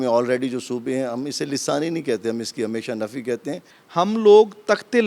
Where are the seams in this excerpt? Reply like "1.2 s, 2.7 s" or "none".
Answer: 3.7 s